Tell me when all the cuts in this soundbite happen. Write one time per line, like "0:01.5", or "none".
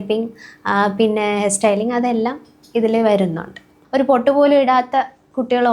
0:03.8